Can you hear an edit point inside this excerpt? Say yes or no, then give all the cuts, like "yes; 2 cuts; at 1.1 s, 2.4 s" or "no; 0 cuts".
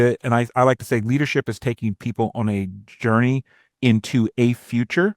no; 0 cuts